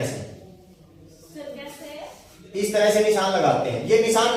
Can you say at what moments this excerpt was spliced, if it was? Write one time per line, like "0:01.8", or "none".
none